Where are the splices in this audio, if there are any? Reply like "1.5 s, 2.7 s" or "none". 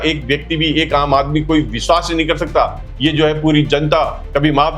2.9 s

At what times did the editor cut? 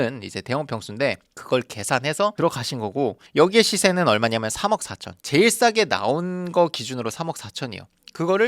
5.2 s

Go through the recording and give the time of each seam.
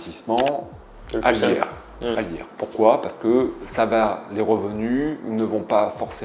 none

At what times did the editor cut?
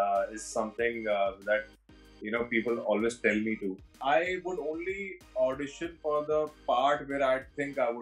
4.0 s

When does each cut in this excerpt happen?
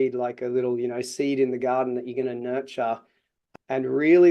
3.4 s

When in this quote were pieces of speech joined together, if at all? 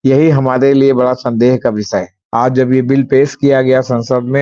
2.2 s

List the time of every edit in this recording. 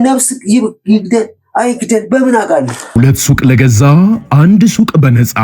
2.8 s

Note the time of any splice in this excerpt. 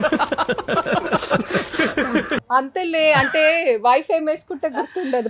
2.4 s

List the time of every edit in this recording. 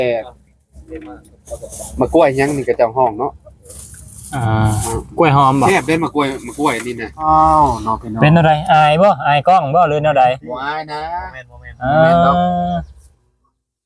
7.2 s

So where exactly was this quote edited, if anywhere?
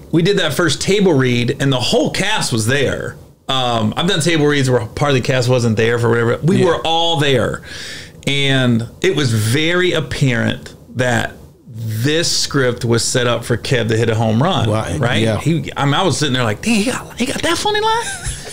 none

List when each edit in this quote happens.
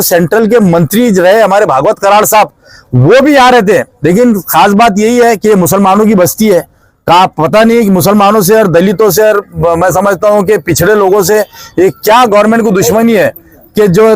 none

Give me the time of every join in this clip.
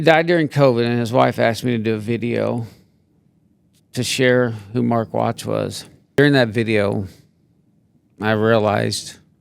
6.2 s

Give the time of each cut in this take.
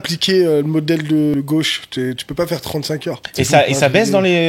1.3 s, 3.2 s

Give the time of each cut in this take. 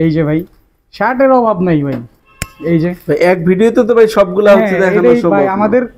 none

